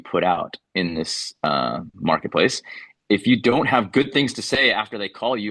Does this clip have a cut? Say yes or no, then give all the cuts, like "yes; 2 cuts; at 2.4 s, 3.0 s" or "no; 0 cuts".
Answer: no; 0 cuts